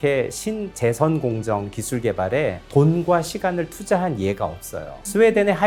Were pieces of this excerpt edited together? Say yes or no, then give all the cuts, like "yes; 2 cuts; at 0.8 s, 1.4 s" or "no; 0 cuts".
no; 0 cuts